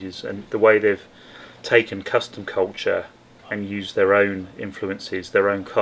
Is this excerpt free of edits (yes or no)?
yes